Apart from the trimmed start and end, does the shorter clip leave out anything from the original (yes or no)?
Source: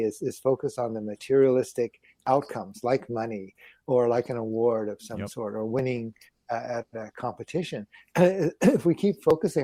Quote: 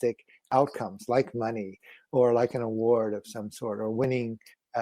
no